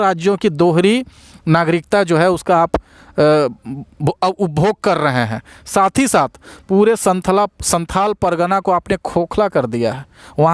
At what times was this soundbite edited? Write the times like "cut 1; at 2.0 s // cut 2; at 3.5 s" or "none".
none